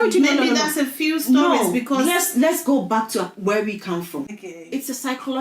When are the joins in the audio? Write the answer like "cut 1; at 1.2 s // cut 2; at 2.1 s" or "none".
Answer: cut 1; at 4.3 s